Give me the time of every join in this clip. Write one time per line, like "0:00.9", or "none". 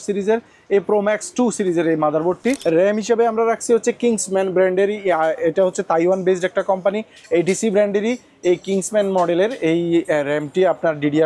0:02.6

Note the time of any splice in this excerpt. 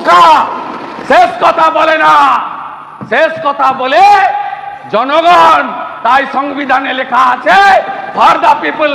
none

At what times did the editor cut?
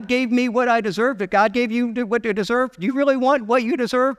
none

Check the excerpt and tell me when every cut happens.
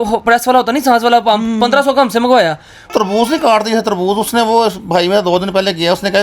0:02.9

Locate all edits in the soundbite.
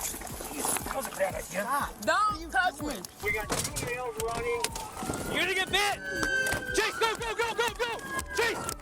0:03.2

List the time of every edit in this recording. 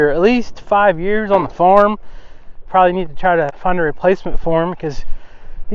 0:02.6

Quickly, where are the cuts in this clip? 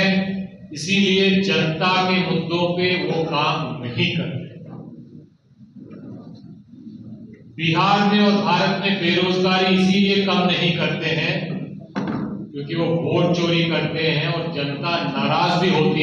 none

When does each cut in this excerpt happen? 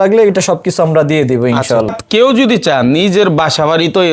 0:01.9

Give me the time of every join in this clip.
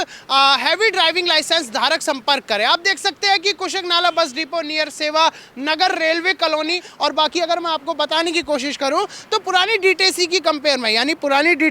0:06.9

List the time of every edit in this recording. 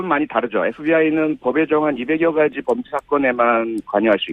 none

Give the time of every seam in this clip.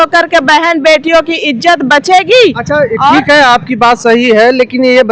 none

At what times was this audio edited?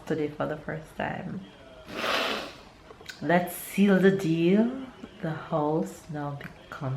none

